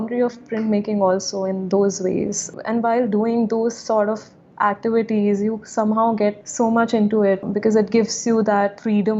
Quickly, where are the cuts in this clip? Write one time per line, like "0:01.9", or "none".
0:02.5
0:06.4
0:07.5